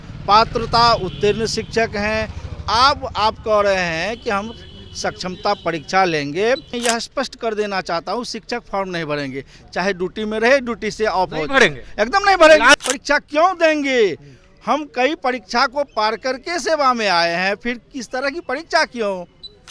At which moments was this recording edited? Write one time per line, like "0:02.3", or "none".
0:06.7
0:12.8